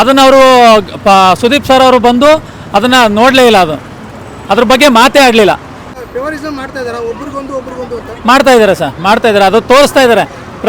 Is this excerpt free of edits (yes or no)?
no